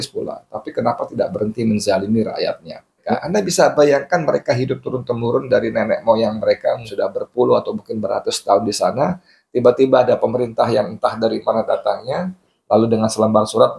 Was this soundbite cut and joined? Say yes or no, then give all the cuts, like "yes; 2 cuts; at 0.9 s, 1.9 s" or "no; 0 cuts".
yes; 2 cuts; at 3.1 s, 6.9 s